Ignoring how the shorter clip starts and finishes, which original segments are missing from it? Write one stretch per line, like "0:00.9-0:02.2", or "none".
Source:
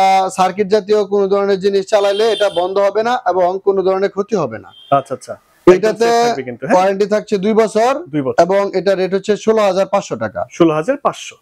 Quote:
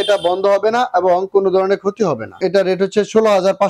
0:04.7-0:08.7

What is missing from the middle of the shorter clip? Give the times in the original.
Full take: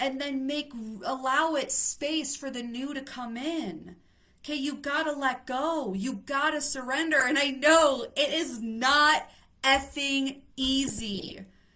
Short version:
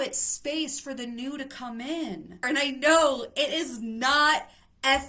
0:04.0-0:07.2

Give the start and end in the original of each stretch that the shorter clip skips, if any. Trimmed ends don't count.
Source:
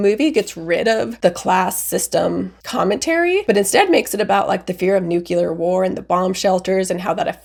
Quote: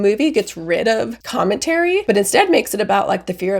0:01.1-0:02.5

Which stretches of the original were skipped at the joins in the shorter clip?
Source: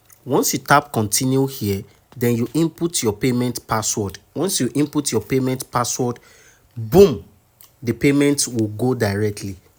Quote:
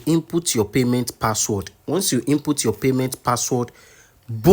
none

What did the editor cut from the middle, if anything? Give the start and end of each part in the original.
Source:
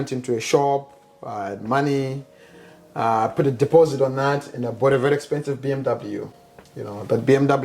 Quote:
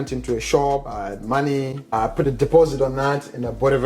0:00.9-0:01.3
0:02.3-0:03.1

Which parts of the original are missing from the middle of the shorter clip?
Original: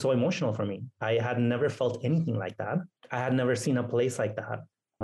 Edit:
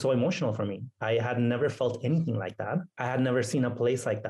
0:02.9-0:03.1

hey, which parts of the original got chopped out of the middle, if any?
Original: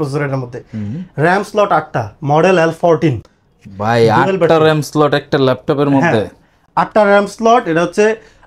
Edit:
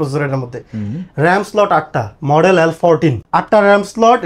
0:03.3-0:06.7

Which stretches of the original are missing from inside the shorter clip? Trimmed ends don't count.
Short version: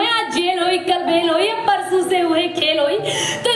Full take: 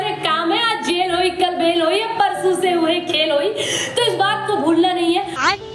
none

